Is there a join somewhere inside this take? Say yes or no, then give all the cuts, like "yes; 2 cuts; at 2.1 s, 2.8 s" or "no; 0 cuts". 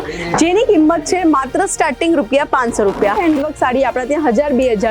yes; 1 cut; at 3.2 s